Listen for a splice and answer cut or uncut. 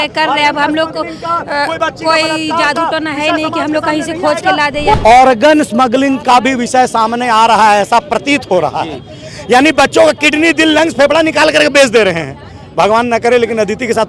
cut